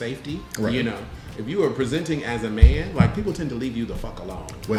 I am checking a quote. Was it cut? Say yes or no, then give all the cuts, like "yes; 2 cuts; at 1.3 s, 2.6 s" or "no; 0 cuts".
no; 0 cuts